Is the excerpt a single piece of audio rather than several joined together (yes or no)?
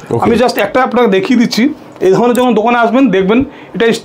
yes